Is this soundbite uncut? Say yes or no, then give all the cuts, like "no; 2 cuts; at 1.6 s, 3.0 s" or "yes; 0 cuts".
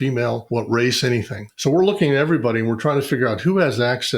yes; 0 cuts